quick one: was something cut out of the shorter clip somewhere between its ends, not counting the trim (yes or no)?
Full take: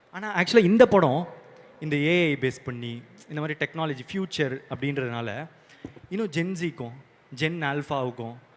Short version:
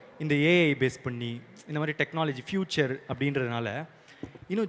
no